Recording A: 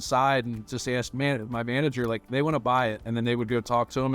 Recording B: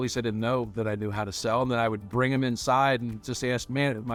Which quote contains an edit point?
A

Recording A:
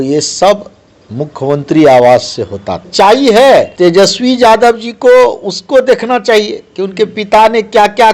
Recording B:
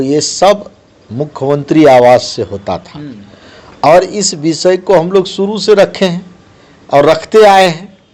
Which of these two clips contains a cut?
A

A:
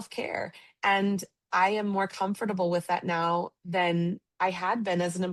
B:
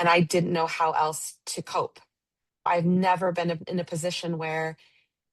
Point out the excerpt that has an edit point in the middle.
B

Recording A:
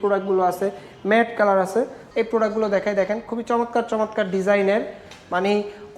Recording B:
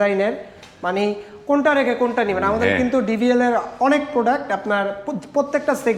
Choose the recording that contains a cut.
A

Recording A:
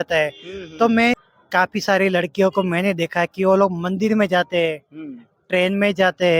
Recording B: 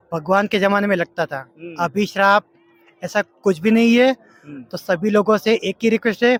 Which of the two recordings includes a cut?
A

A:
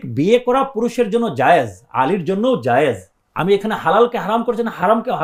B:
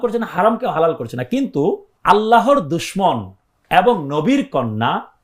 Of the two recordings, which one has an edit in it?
B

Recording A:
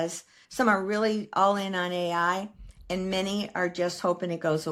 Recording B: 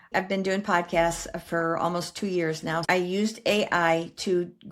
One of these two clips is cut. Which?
B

